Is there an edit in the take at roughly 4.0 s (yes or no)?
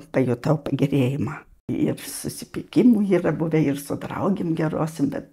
no